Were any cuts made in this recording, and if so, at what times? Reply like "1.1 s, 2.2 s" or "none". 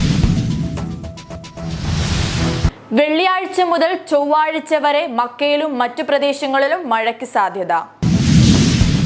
1.5 s, 7.9 s